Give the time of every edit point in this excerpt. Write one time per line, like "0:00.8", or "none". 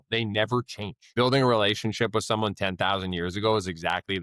0:01.1